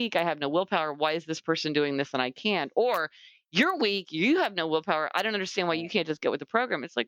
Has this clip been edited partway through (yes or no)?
no